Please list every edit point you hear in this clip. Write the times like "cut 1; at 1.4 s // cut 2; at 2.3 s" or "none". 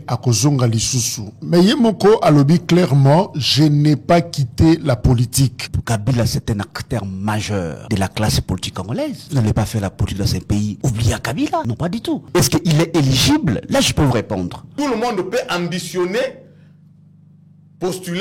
cut 1; at 5.7 s // cut 2; at 7.8 s // cut 3; at 9.2 s // cut 4; at 10.8 s // cut 5; at 12.0 s // cut 6; at 14.7 s

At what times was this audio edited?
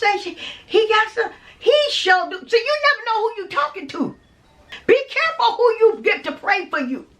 cut 1; at 4.8 s

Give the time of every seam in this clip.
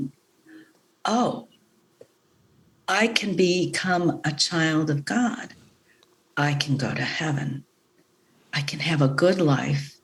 none

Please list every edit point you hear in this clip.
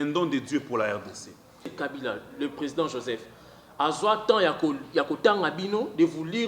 cut 1; at 1.7 s

